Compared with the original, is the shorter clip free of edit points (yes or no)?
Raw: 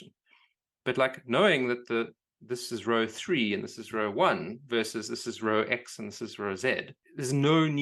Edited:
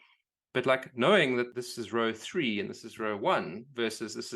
no